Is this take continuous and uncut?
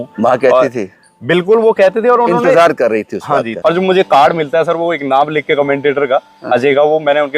no; 1 cut; at 3.5 s

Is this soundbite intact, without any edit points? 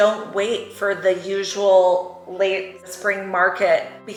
yes; 0 cuts

